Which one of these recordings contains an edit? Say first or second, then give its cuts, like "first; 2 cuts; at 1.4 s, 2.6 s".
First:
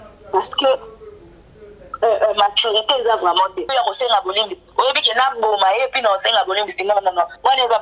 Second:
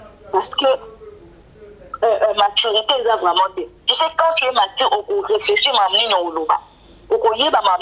first; 1 cut; at 3.7 s